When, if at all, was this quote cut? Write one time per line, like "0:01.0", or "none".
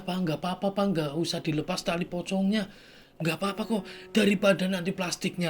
none